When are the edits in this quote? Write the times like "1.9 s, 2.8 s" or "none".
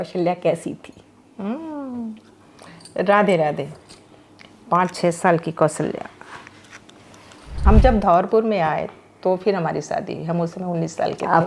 7.6 s